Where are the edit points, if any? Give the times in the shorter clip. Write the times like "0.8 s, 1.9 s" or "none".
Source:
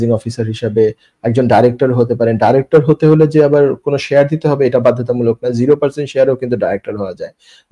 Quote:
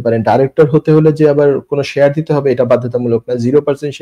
none